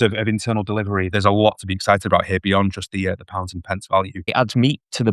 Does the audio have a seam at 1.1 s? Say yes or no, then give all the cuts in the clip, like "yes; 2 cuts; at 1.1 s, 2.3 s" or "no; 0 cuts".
yes; 2 cuts; at 1.1 s, 4.2 s